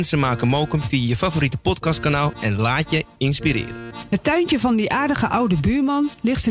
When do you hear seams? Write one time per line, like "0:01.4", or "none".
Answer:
0:03.9